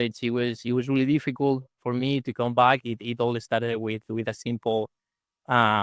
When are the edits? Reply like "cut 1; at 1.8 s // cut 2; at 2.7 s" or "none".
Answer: none